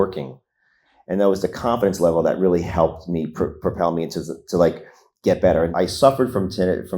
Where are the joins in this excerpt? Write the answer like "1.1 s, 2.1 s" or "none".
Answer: 5.7 s